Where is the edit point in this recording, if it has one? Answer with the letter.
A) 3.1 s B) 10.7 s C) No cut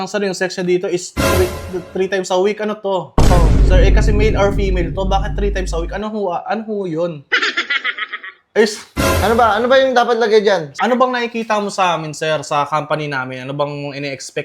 B